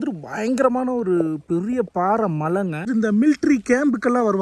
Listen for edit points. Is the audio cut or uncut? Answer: cut